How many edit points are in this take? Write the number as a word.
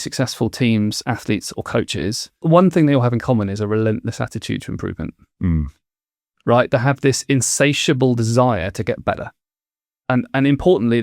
one